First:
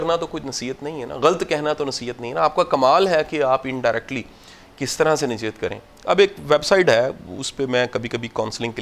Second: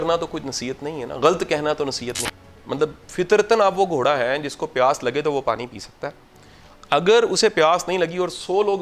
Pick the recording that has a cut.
second; 1 cut; at 2.1 s

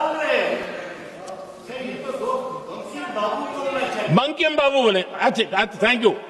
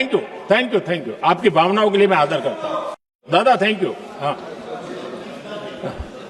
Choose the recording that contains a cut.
second; 1 cut; at 3.2 s

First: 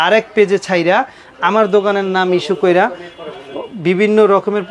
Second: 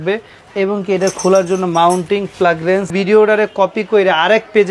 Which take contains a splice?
second; 1 cut; at 2.9 s

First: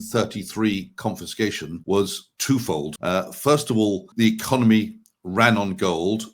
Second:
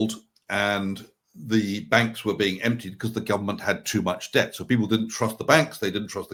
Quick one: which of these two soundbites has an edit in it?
first; 3 cuts; at 1.7 s, 2.9 s, 4.1 s

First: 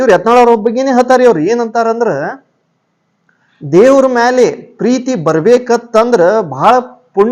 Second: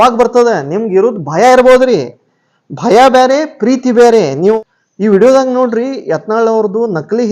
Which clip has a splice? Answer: second; 1 cut; at 4.4 s

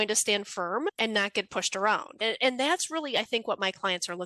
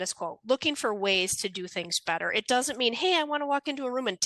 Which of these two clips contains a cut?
first; 2 cuts; at 0.9 s, 2.2 s

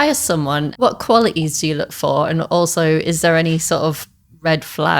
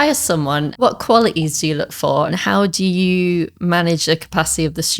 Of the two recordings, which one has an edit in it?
second; 1 cut; at 2.3 s

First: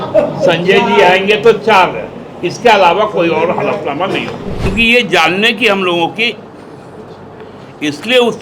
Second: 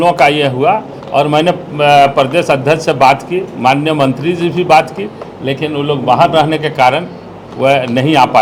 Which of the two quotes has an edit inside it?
first; 1 cut; at 4.7 s

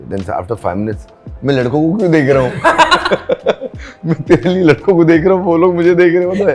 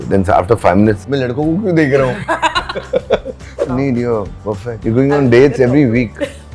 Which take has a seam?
second; 3 cuts; at 1.0 s, 3.7 s, 4.7 s

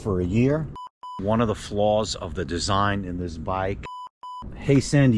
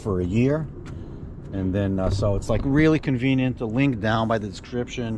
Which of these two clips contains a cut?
first; 2 cuts; at 1.2 s, 4.0 s

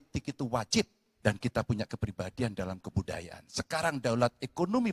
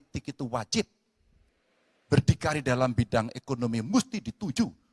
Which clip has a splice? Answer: first; 1 cut; at 1.0 s

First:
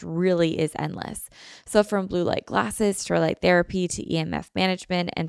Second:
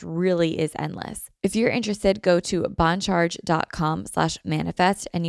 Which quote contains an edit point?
second; 1 cut; at 1.2 s

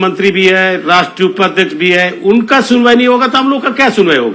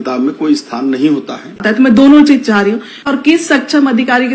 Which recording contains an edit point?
second; 2 cuts; at 1.6 s, 3.0 s

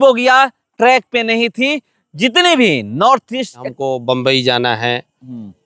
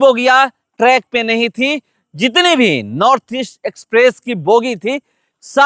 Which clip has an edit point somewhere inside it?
first; 1 cut; at 3.7 s

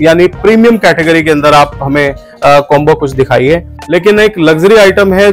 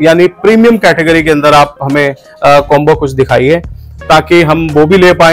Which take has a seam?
first; 1 cut; at 3.7 s

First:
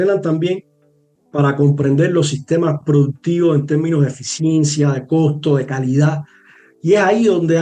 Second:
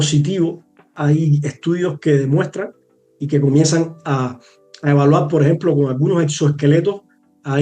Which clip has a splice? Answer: second; 1 cut; at 0.9 s

